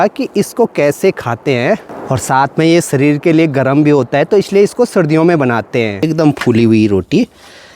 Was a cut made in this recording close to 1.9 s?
yes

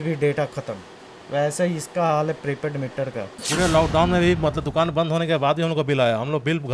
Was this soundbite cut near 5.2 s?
no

